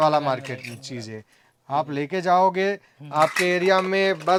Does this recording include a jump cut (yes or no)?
no